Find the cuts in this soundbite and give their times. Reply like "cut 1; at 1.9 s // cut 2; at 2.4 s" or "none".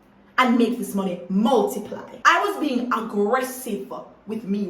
cut 1; at 2.0 s